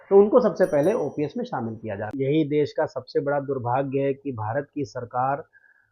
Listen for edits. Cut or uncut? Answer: cut